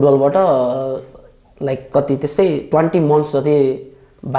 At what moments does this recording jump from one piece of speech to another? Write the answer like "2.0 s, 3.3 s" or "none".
none